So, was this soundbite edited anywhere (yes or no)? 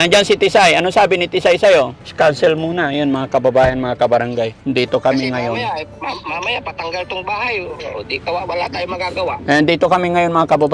yes